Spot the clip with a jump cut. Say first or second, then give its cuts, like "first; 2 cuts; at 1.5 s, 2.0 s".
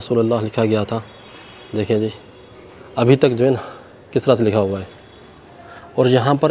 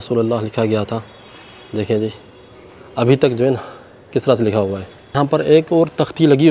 second; 1 cut; at 5.1 s